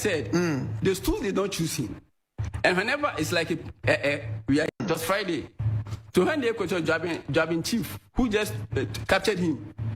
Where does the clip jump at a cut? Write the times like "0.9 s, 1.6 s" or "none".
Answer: 4.7 s